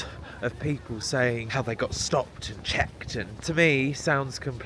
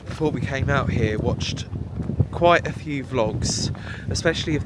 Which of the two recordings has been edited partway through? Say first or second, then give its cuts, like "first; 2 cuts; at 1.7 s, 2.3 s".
first; 2 cuts; at 1.5 s, 3.3 s